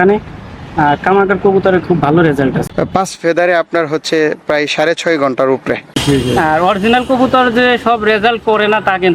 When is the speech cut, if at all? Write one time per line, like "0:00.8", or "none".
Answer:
0:02.6
0:05.9